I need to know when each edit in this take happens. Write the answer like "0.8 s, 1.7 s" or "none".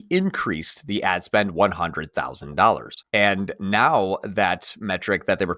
2.9 s